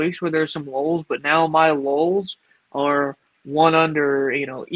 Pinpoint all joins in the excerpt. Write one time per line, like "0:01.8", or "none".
none